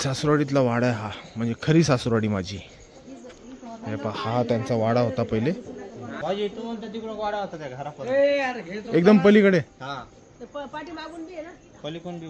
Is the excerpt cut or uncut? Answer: cut